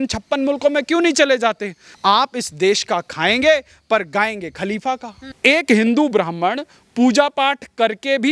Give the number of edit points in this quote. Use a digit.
2